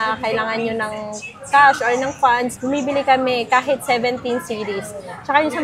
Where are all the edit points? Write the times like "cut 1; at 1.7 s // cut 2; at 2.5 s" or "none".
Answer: none